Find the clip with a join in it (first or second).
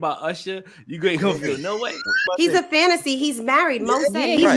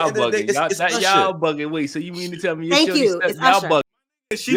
first